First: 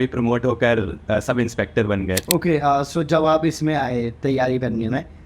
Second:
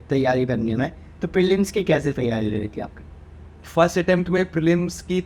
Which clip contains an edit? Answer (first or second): first